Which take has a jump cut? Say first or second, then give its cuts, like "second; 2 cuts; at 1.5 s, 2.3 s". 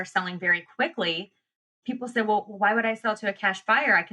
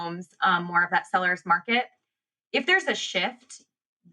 first; 1 cut; at 1.7 s